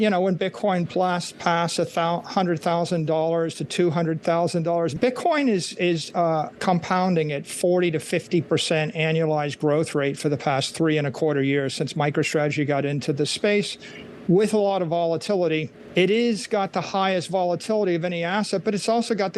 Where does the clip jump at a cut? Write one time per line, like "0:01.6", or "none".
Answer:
0:04.9
0:15.8